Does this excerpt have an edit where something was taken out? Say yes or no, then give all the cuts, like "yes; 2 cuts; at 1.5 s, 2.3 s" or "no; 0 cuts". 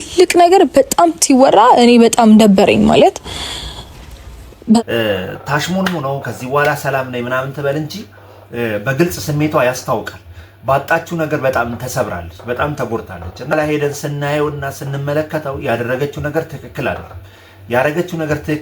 yes; 2 cuts; at 4.8 s, 13.5 s